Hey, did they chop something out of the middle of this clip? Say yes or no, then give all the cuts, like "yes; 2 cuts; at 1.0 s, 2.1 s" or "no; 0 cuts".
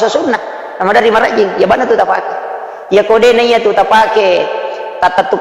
no; 0 cuts